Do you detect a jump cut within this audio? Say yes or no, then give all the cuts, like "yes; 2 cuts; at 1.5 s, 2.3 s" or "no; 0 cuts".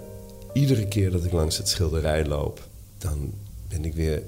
yes; 1 cut; at 3.3 s